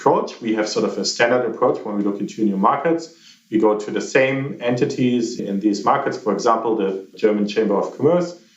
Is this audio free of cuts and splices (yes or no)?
no